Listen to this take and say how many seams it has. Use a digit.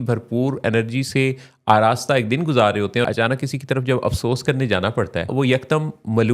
2